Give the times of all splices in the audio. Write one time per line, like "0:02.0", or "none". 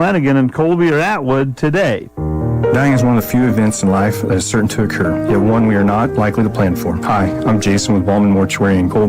0:02.2